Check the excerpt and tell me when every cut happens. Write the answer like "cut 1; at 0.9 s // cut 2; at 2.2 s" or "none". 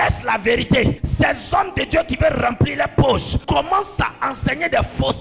cut 1; at 1.0 s // cut 2; at 3.3 s